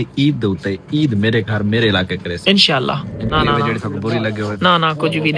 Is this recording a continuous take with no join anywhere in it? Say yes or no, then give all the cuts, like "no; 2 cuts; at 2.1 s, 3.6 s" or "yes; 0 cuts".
no; 1 cut; at 3.3 s